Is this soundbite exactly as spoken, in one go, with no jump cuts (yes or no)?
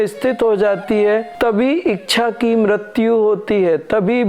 no